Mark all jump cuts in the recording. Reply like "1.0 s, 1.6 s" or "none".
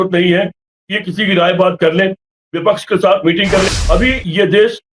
3.7 s